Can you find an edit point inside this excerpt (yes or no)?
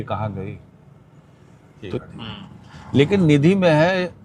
yes